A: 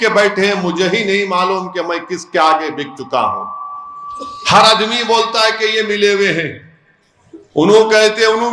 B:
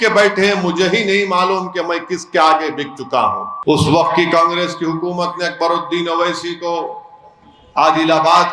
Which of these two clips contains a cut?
B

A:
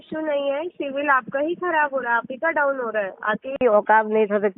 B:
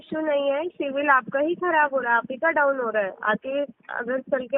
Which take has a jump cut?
A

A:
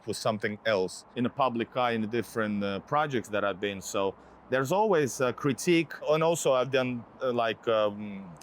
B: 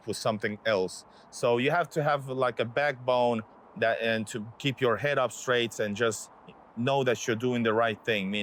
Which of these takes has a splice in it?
A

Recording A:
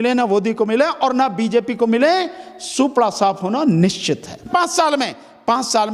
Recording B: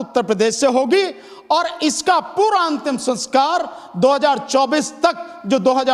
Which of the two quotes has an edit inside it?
A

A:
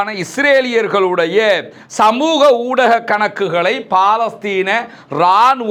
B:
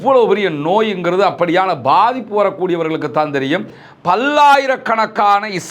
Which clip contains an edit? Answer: B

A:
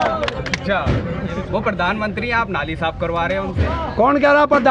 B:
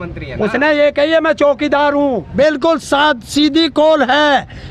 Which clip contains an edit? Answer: B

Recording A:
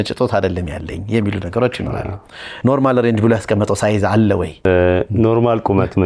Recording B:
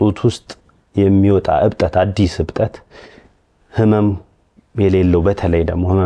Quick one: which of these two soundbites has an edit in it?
A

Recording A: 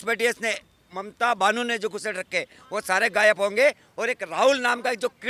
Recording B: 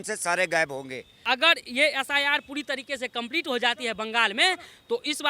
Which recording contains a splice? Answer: B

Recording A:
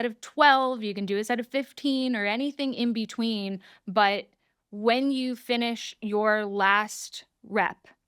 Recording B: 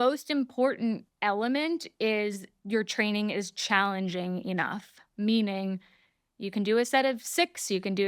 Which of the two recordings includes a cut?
B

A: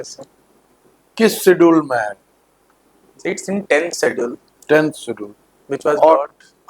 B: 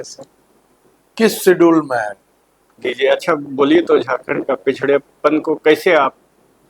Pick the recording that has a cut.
B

